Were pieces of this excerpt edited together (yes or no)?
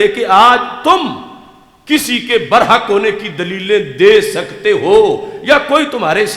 no